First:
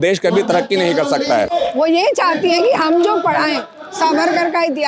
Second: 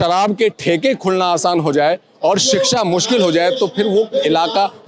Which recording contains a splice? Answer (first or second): first